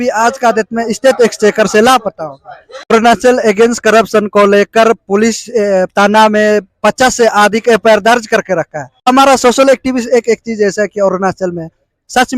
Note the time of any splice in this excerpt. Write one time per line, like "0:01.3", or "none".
0:02.9
0:09.1

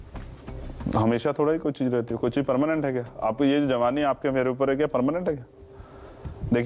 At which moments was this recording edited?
none

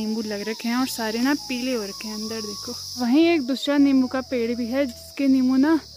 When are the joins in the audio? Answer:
none

